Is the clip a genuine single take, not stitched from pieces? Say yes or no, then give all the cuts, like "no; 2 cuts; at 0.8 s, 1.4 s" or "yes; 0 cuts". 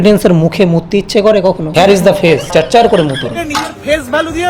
no; 2 cuts; at 1.6 s, 3.4 s